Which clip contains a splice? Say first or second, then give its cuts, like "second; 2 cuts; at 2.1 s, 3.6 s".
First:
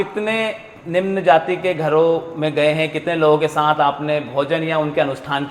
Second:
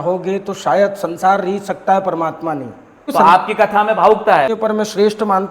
second; 2 cuts; at 3.0 s, 4.5 s